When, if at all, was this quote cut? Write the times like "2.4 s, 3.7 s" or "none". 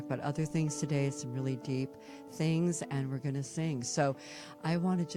none